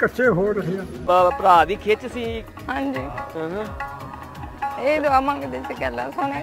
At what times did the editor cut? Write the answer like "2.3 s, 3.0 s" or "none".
1.0 s